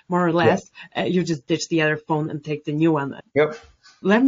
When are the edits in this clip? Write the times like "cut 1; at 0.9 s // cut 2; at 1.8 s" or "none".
cut 1; at 3.2 s